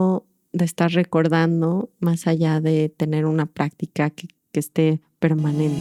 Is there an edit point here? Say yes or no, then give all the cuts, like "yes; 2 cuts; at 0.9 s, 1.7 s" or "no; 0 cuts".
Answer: no; 0 cuts